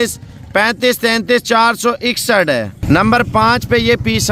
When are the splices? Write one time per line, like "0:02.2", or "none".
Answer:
none

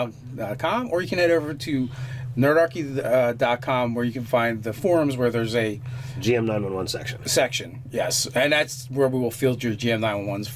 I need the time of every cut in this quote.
none

